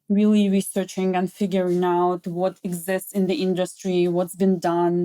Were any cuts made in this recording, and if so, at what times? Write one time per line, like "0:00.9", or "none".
none